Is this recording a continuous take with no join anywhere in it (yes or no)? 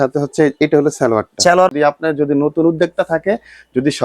no